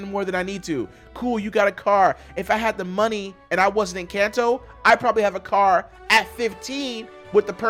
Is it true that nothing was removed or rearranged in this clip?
yes; 0 cuts

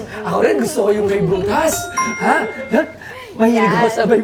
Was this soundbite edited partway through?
no; 0 cuts

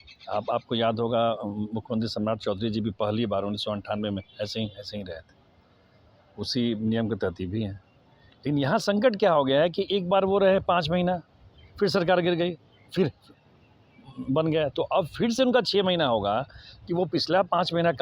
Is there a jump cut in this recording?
no; 0 cuts

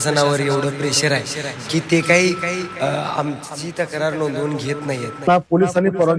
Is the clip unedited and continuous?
no; 1 cut; at 5.1 s

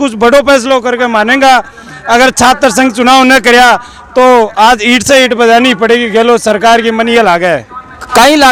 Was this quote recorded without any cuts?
yes; 0 cuts

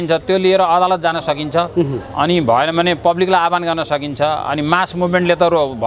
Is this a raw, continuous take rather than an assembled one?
yes; 0 cuts

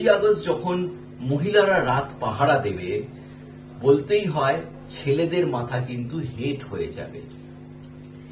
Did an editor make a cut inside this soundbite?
no; 0 cuts

